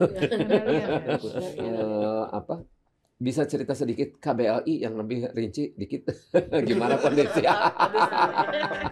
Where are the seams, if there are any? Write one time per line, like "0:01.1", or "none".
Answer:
0:01.6